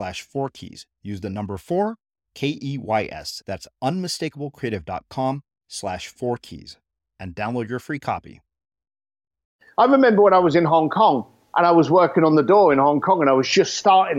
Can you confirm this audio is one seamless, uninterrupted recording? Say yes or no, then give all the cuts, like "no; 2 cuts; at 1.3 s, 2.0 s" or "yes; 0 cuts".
no; 1 cut; at 9.6 s